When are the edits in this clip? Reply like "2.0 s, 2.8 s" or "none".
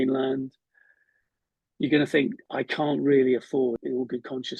2.4 s, 3.8 s